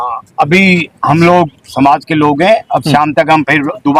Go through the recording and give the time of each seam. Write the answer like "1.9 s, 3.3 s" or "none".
none